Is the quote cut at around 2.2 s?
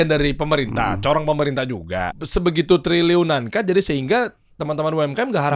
yes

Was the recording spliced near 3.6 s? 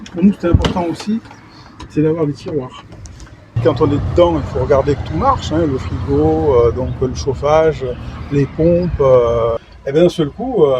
yes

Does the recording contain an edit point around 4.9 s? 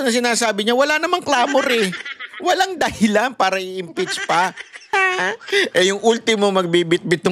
yes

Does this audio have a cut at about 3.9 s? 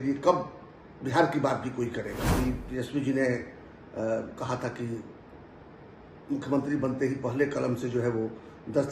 no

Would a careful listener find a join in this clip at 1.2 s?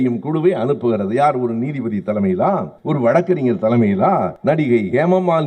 no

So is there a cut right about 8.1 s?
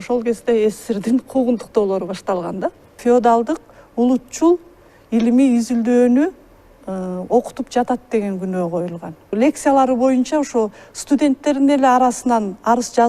no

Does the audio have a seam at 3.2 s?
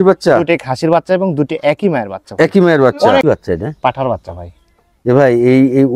yes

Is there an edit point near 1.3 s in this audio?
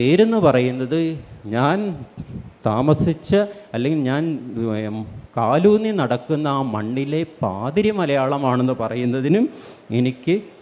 no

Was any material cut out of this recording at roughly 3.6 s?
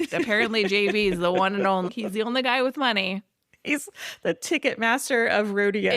no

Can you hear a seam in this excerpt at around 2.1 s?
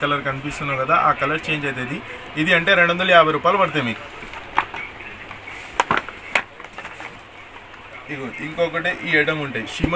no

